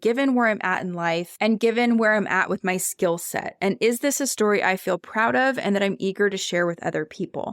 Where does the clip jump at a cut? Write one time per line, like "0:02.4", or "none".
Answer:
0:01.3